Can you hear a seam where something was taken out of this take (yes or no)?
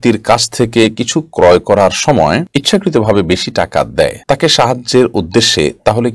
no